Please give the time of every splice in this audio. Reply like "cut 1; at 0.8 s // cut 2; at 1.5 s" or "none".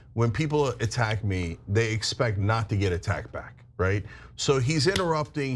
cut 1; at 4.0 s